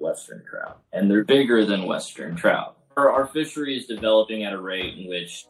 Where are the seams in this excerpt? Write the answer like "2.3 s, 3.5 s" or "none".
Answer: 1.2 s, 2.9 s